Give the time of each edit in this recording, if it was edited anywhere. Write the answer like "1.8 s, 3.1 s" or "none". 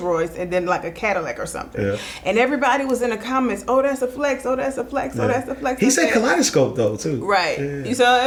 none